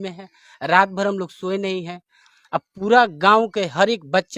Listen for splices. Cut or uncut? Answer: uncut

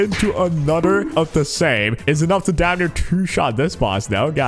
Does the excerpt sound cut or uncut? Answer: cut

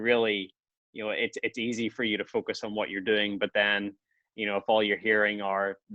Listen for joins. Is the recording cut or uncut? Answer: uncut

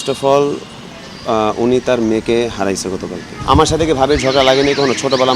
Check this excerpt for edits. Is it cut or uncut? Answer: cut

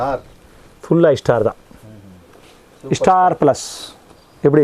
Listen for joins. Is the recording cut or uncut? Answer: uncut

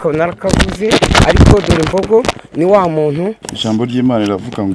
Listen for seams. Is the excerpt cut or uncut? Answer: cut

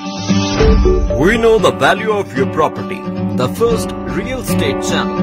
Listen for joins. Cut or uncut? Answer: uncut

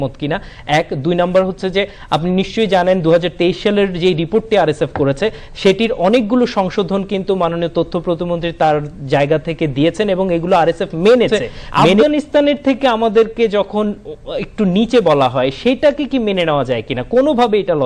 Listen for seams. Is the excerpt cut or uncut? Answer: cut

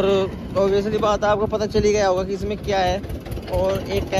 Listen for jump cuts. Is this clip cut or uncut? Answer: uncut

